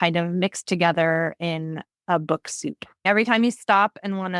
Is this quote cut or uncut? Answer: cut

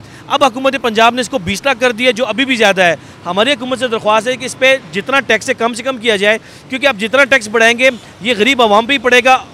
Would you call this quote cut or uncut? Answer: uncut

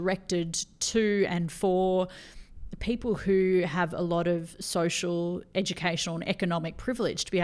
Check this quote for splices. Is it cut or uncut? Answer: uncut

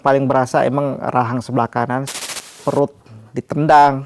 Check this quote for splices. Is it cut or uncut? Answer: cut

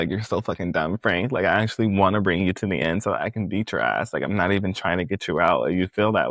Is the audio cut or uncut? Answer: uncut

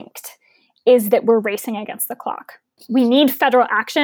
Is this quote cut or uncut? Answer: cut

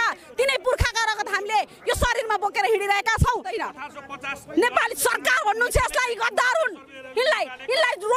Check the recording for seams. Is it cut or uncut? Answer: cut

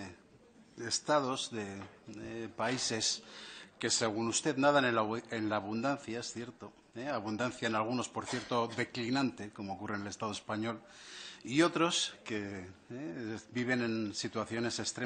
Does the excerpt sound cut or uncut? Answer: uncut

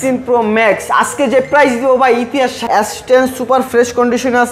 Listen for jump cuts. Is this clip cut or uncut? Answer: cut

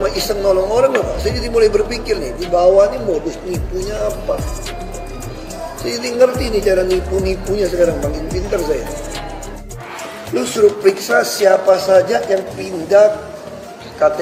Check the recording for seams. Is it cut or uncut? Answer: cut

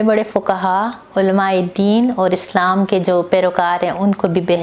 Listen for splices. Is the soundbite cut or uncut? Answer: uncut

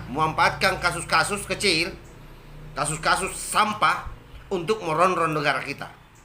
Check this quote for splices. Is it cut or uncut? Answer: uncut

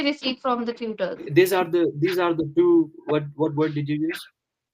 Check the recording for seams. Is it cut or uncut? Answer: cut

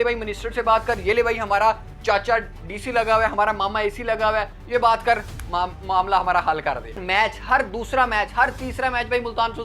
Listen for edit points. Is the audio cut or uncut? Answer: cut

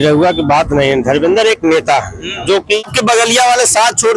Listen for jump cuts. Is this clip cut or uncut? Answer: cut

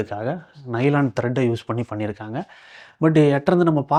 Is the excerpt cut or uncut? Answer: uncut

